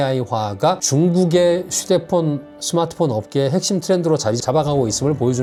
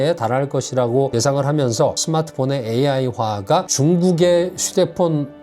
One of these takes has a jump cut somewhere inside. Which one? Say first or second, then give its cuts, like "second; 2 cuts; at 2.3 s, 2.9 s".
second; 1 cut; at 2.0 s